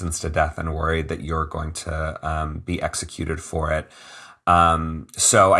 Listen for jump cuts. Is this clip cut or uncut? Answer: uncut